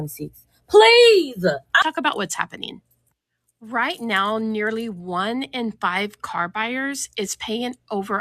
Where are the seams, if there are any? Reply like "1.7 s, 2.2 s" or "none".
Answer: 1.8 s

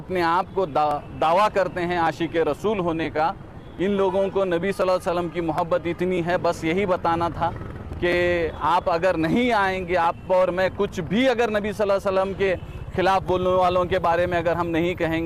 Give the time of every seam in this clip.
none

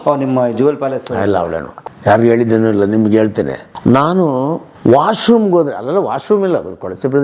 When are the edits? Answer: 1.8 s, 3.6 s, 4.7 s

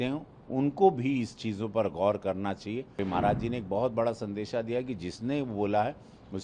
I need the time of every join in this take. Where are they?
3.0 s

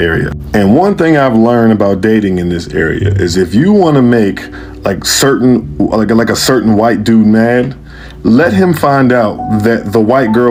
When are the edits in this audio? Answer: none

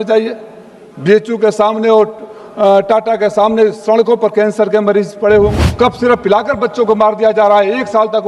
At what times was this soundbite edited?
5.6 s

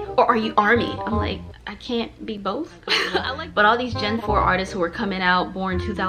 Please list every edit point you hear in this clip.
3.1 s

